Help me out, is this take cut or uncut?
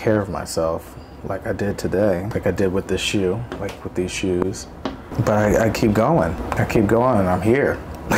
cut